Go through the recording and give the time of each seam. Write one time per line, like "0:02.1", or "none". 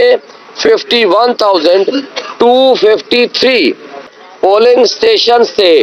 0:04.2